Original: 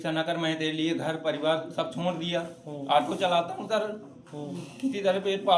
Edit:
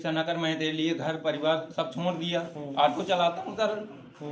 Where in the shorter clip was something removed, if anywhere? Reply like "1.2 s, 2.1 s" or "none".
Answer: 2.6 s